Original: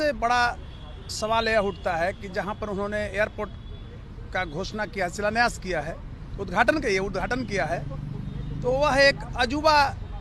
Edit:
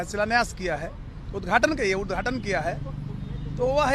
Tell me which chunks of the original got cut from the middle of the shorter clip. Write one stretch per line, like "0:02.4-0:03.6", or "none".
none